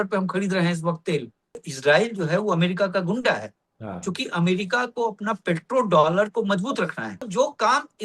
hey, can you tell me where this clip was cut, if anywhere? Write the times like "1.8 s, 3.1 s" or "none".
1.6 s, 7.3 s